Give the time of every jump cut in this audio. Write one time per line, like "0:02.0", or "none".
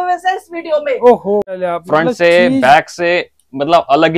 0:01.5